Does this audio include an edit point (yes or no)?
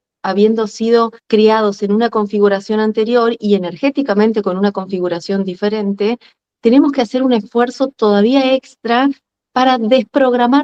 no